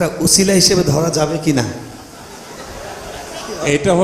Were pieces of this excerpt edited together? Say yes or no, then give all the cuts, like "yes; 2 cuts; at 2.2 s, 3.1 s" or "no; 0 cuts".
no; 0 cuts